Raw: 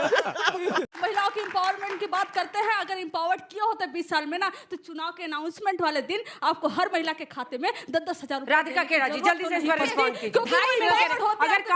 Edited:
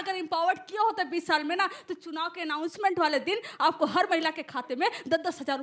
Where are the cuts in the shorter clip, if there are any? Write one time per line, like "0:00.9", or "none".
none